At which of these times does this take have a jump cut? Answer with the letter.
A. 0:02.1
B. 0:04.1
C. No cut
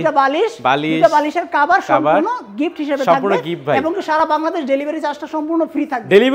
C